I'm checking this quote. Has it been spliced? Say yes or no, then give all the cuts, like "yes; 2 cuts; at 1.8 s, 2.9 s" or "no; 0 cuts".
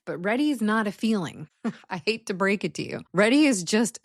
yes; 2 cuts; at 1.4 s, 3.0 s